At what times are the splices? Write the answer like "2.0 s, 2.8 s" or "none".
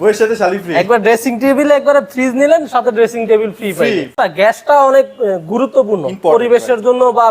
4.1 s

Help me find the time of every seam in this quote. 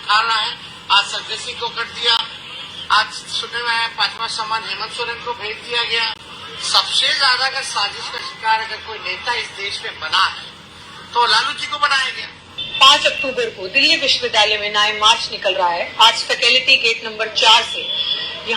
6.2 s, 12.6 s

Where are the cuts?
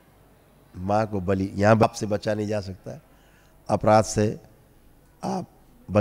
1.8 s

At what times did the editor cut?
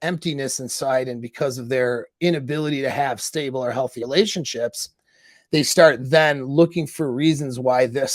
4.0 s

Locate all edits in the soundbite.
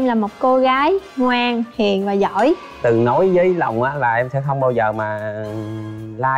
2.8 s

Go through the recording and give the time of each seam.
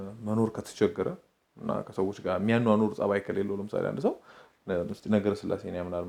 none

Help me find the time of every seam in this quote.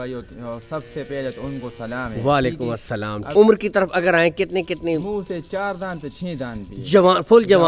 3.3 s

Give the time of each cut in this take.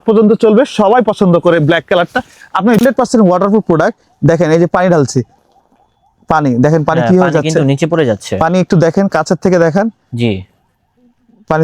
2.8 s

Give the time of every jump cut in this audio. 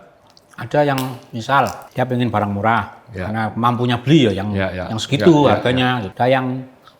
1.8 s, 6.1 s

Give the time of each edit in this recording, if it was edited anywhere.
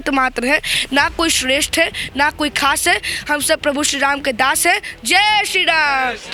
none

